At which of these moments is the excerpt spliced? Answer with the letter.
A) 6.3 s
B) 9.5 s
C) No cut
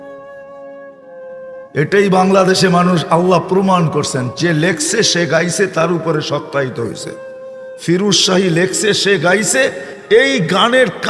B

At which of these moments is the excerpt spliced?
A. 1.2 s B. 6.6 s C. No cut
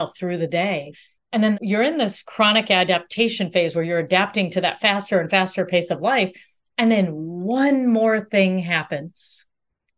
A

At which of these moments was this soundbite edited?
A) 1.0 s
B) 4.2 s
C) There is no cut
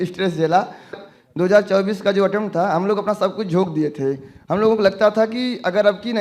A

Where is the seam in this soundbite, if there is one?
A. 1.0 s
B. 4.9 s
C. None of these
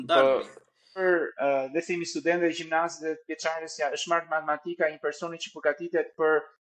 A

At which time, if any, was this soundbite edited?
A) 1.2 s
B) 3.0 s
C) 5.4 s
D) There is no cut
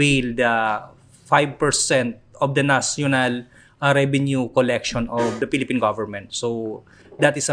C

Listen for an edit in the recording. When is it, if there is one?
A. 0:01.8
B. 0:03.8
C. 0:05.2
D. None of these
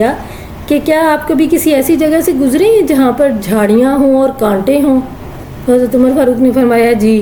D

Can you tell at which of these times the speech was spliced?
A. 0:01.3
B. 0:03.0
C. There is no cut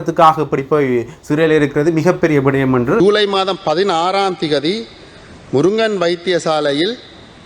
B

